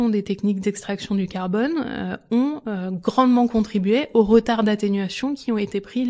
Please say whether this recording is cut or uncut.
uncut